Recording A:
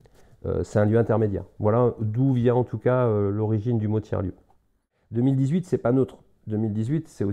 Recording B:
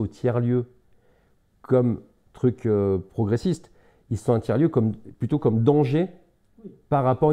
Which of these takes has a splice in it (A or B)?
A